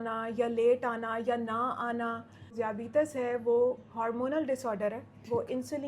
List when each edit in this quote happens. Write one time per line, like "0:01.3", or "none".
0:02.5